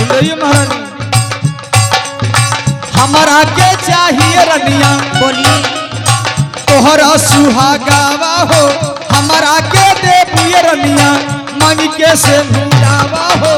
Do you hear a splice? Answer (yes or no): no